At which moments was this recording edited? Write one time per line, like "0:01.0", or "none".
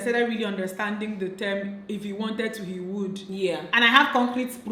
none